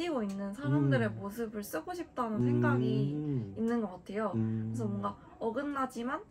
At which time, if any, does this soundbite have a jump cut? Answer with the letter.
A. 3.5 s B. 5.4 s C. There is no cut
C